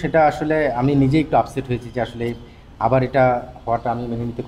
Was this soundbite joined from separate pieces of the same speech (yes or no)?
no